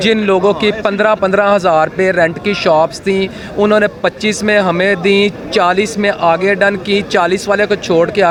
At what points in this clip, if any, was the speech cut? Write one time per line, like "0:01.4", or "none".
none